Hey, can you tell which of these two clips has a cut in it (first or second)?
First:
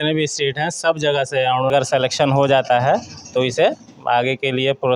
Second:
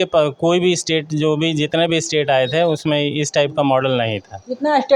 first